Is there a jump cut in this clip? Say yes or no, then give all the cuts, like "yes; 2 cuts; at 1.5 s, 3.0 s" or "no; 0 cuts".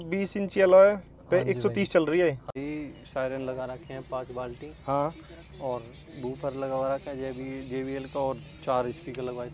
yes; 1 cut; at 2.5 s